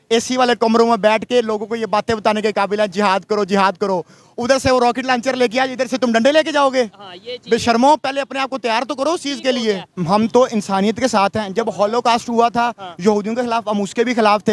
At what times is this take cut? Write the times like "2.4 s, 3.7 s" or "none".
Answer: 9.9 s